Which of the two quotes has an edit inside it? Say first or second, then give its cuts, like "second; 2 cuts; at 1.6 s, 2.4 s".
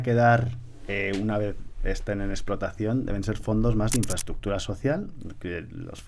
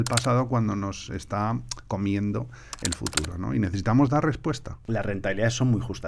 second; 1 cut; at 4.7 s